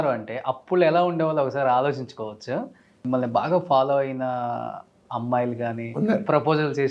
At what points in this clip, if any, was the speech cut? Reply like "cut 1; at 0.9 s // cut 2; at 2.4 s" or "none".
cut 1; at 3.0 s